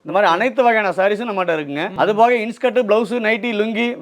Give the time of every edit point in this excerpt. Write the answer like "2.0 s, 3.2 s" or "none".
1.9 s